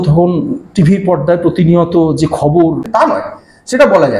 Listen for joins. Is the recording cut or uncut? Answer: cut